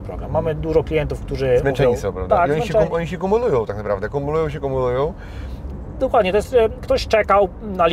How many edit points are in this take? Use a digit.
0